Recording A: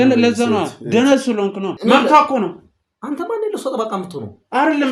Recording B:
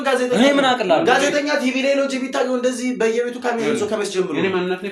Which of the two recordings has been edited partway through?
A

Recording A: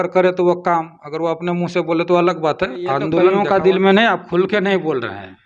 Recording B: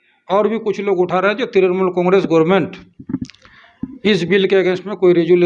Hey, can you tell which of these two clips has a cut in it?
A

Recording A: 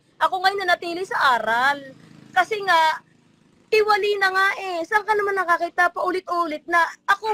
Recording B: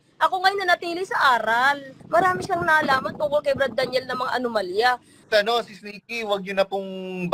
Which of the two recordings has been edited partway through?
B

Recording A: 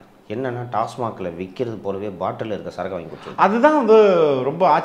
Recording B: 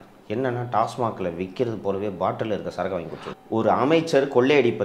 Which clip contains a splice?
B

